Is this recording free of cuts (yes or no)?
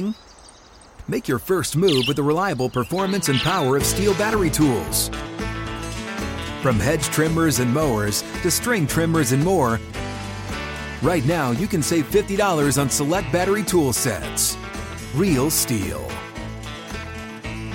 yes